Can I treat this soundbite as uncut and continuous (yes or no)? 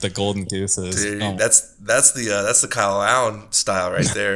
yes